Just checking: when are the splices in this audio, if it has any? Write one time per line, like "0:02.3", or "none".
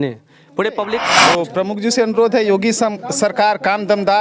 0:01.2

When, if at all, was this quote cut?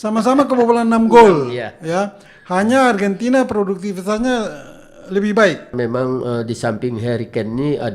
0:05.7

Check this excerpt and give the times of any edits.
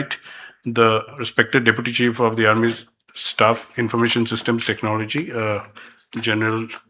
0:05.2

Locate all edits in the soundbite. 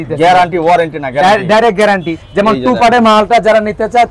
0:02.2

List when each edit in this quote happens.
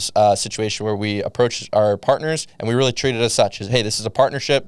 none

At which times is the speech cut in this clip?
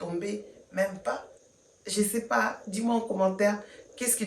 0:01.4

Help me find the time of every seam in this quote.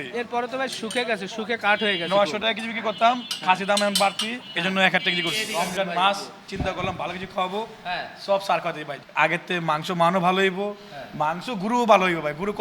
0:05.5
0:08.9

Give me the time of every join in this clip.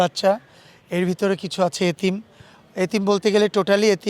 none

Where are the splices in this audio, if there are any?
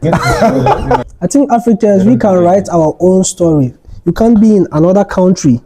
0:01.1

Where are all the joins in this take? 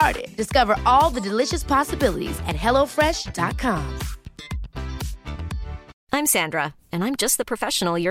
0:05.9

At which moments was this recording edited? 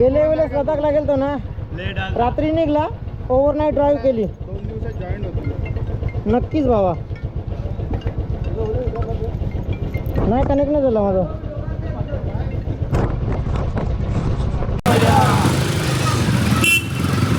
none

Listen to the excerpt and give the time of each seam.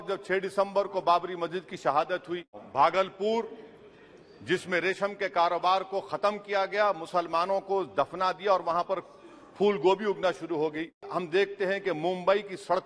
0:02.6
0:11.1

